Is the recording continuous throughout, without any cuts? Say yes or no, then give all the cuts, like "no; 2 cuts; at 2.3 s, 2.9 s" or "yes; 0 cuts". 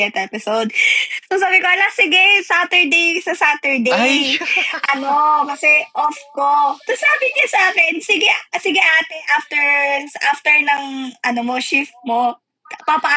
yes; 0 cuts